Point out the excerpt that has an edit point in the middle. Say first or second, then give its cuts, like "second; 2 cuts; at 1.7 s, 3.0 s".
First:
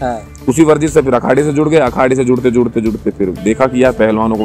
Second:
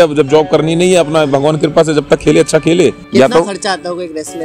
second; 1 cut; at 3.0 s